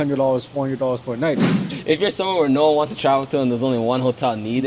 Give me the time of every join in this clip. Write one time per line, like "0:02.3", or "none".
0:01.5

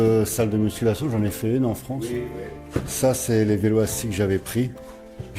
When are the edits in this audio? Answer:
none

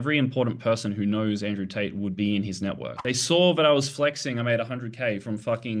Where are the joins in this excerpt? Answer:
0:02.9

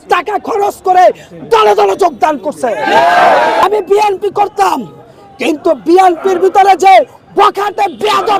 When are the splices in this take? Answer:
0:03.6

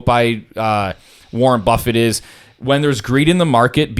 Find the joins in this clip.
none

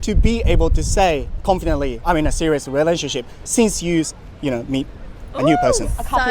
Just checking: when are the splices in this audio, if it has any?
0:02.0

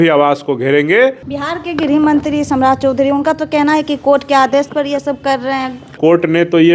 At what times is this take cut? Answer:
0:01.3
0:06.0

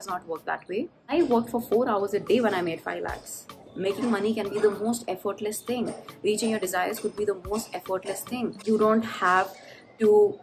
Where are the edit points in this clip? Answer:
0:01.0
0:03.4
0:08.6

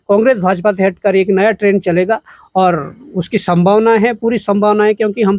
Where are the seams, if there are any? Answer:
none

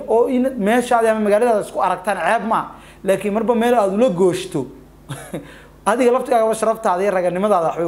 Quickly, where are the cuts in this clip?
none

